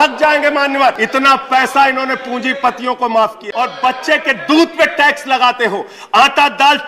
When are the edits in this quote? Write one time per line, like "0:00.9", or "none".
0:01.0
0:03.4